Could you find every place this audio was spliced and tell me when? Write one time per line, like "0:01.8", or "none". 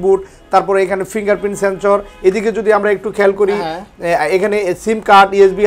none